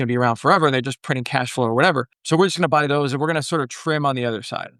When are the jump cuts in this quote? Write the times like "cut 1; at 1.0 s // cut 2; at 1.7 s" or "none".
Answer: cut 1; at 2.1 s